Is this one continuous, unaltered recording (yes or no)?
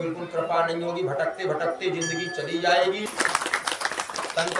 no